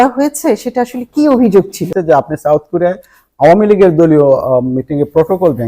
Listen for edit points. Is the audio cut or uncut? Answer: cut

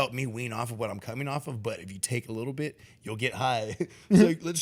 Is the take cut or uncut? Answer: uncut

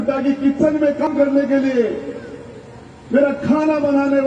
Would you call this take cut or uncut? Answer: cut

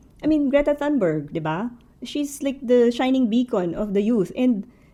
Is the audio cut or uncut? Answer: uncut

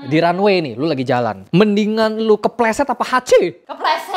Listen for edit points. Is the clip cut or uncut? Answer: uncut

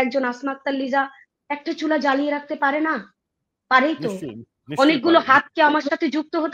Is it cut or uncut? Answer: uncut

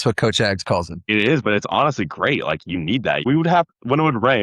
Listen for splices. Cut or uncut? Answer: cut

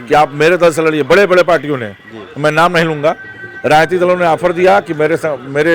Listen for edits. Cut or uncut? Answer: uncut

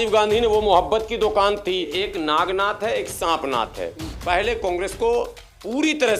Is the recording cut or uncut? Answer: cut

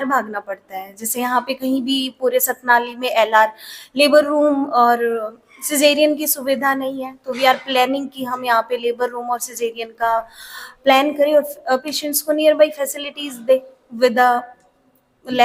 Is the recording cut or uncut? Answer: uncut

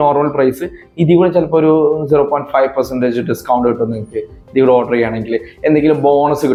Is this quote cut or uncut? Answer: uncut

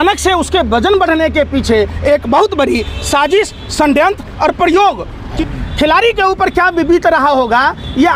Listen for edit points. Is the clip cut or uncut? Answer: cut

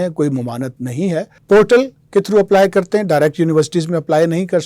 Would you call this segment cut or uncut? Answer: cut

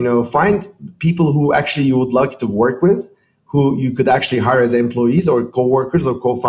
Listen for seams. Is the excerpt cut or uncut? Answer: uncut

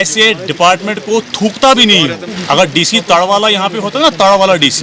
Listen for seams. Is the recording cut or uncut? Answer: cut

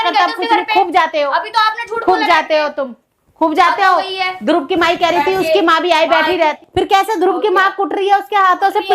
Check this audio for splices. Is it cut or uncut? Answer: cut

